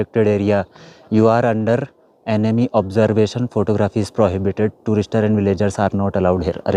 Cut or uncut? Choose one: uncut